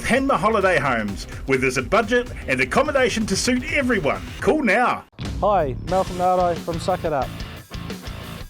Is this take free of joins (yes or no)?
no